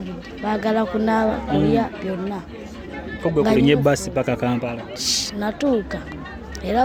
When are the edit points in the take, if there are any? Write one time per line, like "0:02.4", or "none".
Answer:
none

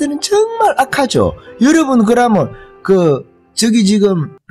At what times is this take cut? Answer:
none

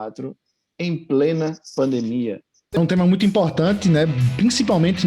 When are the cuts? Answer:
0:02.7

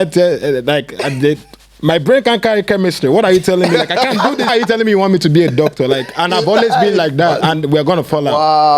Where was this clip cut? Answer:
0:04.5

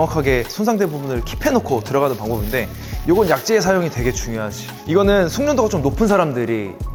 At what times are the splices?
none

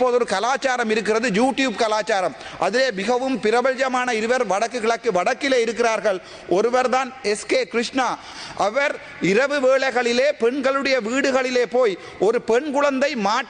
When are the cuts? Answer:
0:08.3

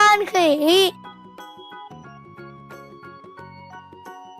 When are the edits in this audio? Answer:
0:00.9
0:03.1

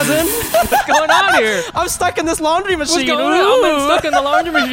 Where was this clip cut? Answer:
none

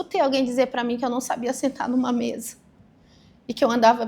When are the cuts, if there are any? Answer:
none

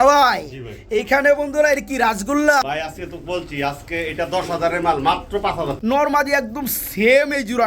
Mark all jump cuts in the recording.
0:02.5
0:05.7

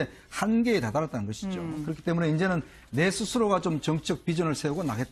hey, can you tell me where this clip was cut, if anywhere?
0:01.1

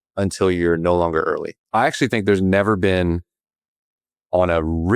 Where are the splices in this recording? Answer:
0:01.5

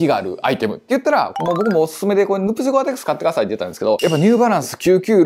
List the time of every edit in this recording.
0:01.3
0:04.0

